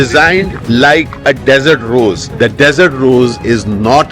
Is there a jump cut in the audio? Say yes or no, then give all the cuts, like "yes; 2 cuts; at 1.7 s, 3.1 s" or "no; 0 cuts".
yes; 1 cut; at 2.2 s